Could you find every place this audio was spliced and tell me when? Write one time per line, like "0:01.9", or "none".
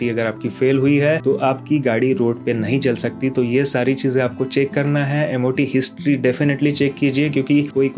none